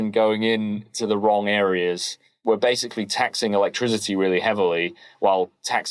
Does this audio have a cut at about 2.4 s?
yes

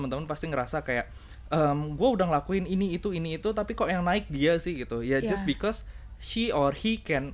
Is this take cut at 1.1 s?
no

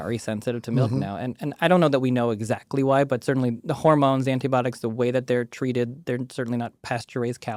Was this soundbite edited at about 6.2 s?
no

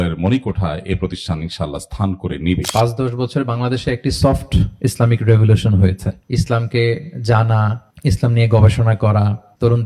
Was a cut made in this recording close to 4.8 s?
no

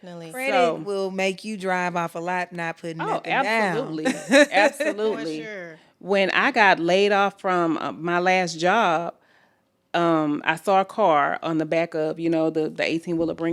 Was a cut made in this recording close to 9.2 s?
no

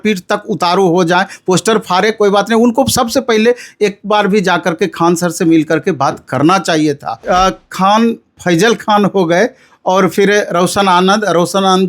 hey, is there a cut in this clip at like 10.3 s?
no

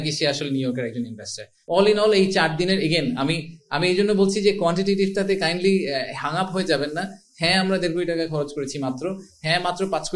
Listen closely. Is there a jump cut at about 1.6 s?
yes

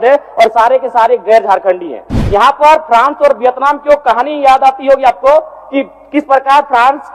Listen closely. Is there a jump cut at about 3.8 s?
no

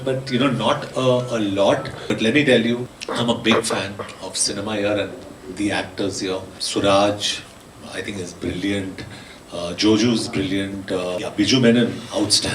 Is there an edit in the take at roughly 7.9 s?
no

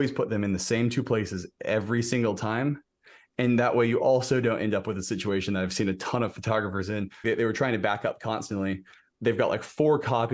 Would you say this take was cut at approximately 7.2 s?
yes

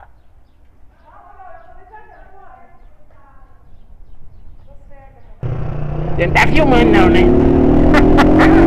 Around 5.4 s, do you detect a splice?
yes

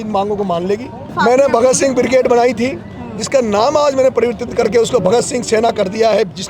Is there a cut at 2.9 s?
no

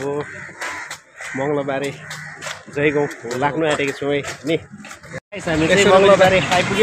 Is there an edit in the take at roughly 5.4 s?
yes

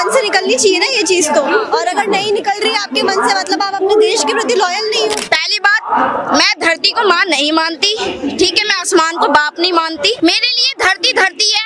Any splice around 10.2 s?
yes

